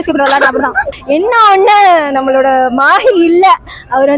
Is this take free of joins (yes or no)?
no